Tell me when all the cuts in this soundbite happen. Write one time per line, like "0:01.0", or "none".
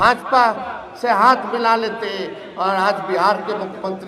none